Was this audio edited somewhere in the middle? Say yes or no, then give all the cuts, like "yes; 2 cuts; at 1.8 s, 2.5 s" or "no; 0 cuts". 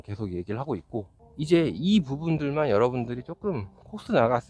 yes; 1 cut; at 1.2 s